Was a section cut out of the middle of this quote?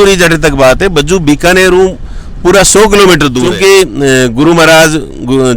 yes; 1 cut; at 3.5 s

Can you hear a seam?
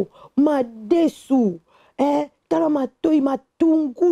no; 0 cuts

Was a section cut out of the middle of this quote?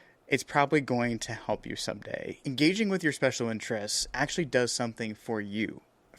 yes; 1 cut; at 2.3 s

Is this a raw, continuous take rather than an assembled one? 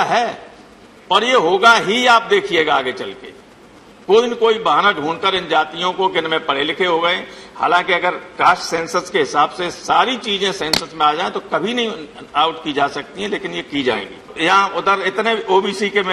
no; 1 cut; at 14.3 s

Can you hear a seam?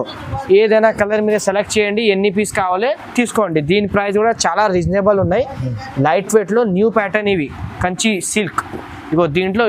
no; 0 cuts

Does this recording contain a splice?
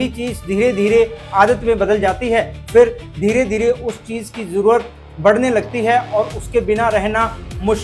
no; 0 cuts

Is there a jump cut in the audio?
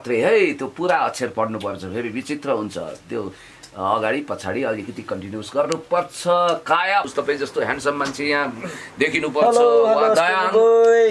yes; 1 cut; at 7.1 s

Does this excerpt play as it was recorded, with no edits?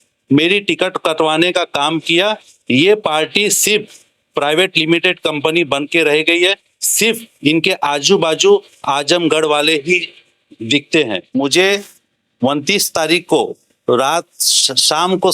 no; 1 cut; at 11.2 s

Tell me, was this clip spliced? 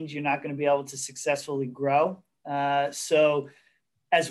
no; 0 cuts

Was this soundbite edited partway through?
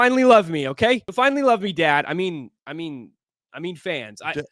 yes; 1 cut; at 1.1 s

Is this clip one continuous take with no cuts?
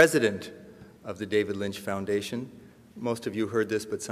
yes; 0 cuts

